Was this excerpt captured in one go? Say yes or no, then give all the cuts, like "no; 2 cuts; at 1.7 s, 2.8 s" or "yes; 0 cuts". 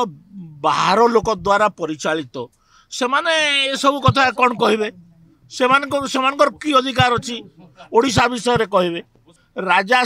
no; 1 cut; at 9.1 s